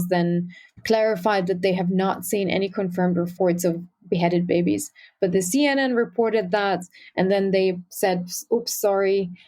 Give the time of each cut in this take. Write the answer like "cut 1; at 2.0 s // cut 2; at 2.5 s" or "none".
cut 1; at 3.3 s